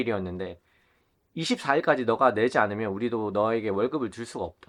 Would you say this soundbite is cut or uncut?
uncut